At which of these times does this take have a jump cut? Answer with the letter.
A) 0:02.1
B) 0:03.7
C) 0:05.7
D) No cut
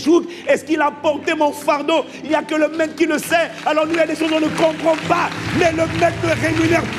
D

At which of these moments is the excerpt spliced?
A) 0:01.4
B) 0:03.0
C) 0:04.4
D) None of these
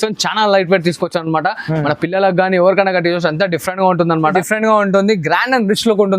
C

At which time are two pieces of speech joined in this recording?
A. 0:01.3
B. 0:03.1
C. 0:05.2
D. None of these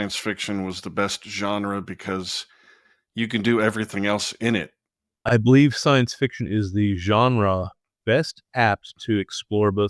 C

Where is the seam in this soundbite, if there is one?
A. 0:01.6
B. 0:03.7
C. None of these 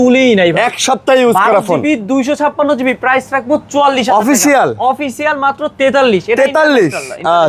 C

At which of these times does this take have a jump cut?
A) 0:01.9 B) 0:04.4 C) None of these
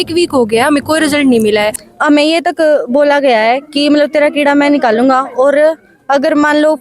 A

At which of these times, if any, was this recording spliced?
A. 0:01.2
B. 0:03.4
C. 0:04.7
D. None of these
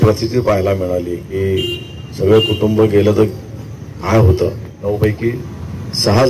C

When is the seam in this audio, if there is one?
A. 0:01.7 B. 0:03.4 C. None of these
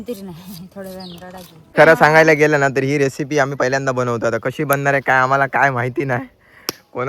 A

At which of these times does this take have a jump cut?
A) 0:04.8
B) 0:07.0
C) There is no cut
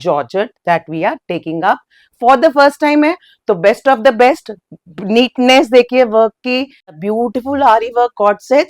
B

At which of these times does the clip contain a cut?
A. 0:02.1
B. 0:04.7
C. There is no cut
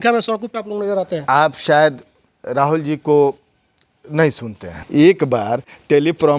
B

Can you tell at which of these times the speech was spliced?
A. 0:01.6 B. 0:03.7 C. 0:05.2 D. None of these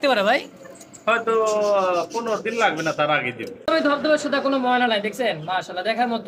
B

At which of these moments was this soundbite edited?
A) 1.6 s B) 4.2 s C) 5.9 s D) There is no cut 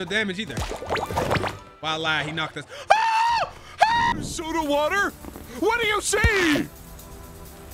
B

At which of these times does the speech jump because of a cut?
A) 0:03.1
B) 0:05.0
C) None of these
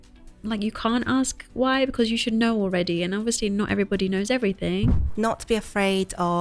B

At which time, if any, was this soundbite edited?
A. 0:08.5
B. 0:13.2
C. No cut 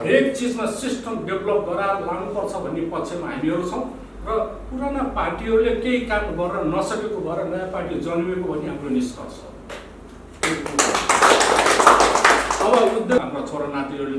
B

